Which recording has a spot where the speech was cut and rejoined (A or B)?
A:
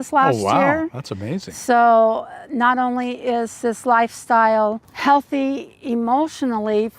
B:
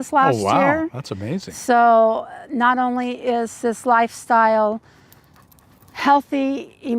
A